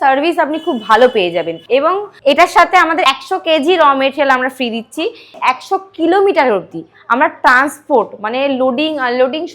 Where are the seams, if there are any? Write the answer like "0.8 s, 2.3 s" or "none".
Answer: 1.6 s, 5.4 s

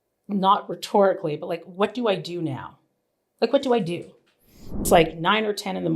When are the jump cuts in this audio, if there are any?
4.8 s

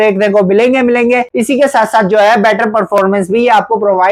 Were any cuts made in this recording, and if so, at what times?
1.3 s

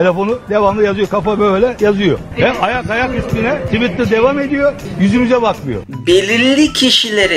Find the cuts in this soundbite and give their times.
3.6 s, 4.8 s, 5.7 s

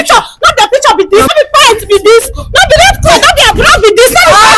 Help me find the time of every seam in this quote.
1.3 s

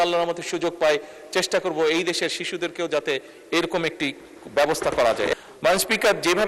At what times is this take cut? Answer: 5.3 s

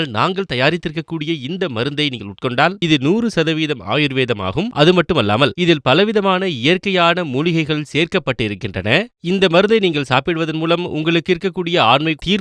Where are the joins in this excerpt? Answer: 2.8 s

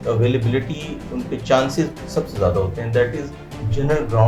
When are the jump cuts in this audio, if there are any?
none

